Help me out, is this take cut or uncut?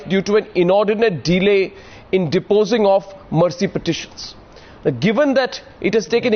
cut